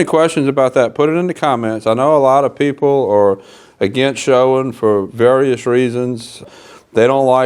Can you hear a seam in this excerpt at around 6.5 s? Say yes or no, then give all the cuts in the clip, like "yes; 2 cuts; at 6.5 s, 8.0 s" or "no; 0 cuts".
yes; 1 cut; at 6.5 s